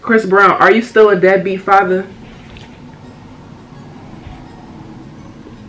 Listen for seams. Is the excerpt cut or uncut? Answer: uncut